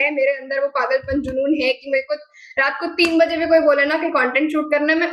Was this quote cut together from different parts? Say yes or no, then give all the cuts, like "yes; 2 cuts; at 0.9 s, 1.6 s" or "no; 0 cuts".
no; 0 cuts